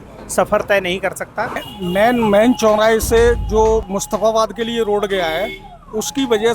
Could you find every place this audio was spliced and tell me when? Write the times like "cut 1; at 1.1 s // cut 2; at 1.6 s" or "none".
cut 1; at 1.7 s